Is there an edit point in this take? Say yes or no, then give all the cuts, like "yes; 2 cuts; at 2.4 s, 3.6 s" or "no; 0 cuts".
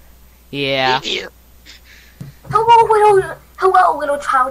no; 0 cuts